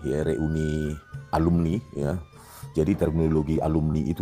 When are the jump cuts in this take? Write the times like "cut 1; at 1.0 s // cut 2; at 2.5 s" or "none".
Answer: none